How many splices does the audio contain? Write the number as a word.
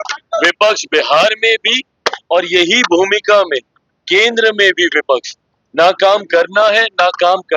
zero